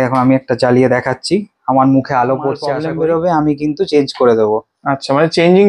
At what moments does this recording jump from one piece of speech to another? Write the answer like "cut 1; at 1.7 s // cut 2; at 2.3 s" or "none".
cut 1; at 2.7 s